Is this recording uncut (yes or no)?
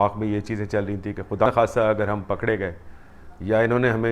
no